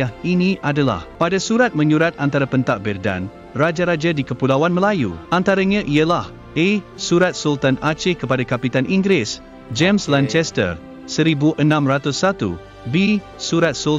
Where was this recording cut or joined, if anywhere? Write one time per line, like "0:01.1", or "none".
0:01.1
0:05.2